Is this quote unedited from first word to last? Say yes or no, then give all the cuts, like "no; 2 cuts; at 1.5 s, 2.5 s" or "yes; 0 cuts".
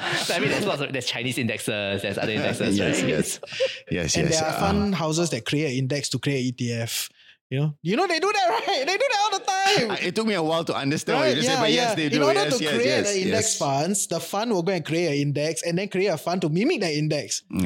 yes; 0 cuts